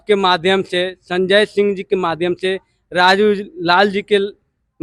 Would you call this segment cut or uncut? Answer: uncut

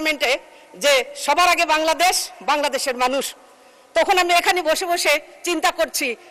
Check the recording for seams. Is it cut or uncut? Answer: uncut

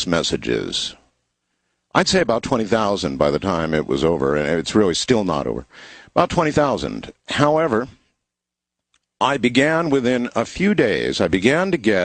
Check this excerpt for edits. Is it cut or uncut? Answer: uncut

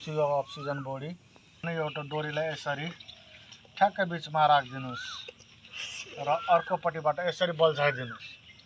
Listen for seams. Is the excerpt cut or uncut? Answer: cut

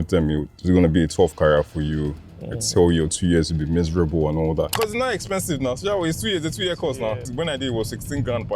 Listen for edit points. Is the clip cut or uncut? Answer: cut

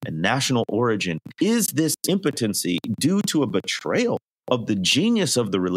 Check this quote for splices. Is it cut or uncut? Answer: cut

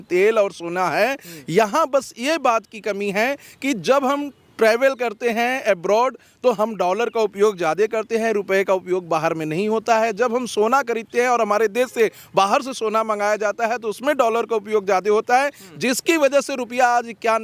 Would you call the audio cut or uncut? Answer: uncut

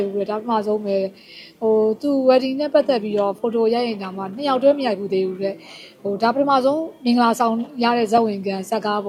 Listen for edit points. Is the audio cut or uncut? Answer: uncut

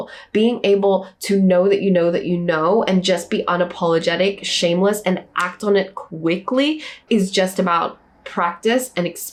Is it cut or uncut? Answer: uncut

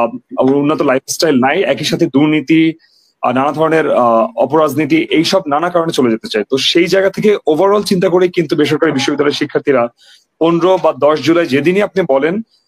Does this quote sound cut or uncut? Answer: uncut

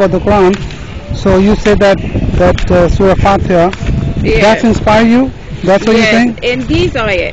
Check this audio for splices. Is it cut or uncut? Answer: uncut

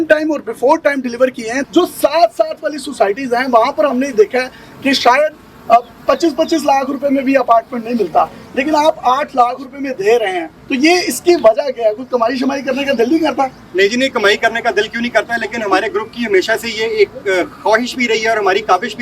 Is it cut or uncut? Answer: cut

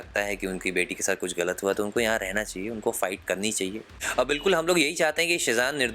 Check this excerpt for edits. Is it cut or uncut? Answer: cut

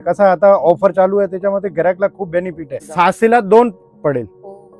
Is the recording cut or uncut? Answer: cut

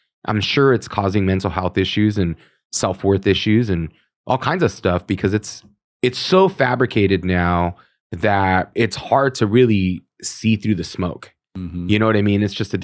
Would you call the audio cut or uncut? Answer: cut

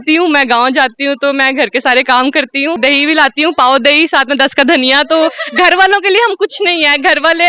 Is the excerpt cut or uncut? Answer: cut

